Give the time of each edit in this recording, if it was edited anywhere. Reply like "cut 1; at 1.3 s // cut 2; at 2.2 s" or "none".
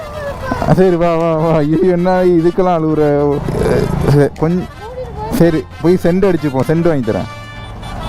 cut 1; at 3.4 s